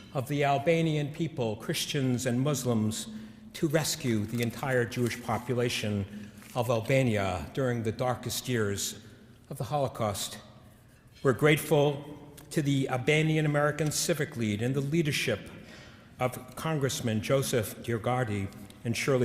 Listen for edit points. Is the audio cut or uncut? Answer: uncut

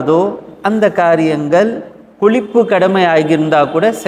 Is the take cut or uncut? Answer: uncut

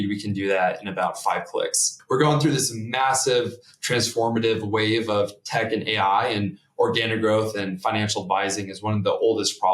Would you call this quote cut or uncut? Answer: cut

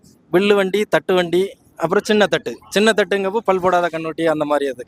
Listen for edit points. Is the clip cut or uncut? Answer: uncut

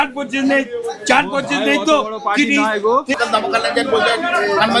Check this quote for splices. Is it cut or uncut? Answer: cut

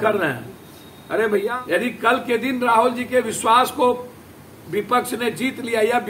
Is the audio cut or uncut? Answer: cut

